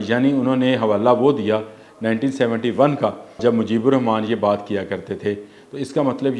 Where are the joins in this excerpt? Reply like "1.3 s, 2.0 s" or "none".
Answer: 3.4 s